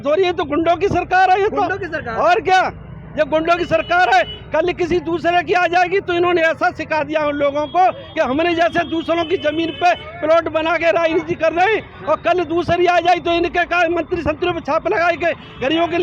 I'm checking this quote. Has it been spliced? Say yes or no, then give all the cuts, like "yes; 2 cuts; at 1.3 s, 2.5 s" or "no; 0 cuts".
no; 0 cuts